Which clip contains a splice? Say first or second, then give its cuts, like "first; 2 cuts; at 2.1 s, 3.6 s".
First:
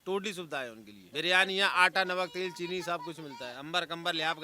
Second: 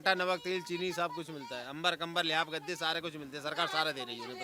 first; 1 cut; at 0.9 s